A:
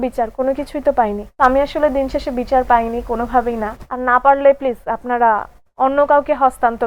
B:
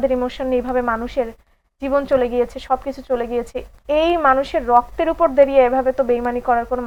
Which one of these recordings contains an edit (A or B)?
A